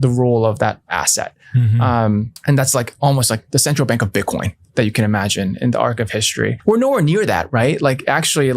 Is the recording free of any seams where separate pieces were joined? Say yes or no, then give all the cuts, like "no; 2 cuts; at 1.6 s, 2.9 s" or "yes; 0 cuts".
no; 2 cuts; at 2.3 s, 6.6 s